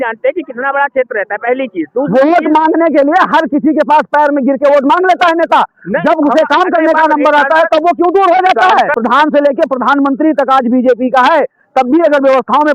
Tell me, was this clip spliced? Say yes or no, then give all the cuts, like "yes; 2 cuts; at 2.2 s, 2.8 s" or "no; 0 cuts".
yes; 1 cut; at 8.9 s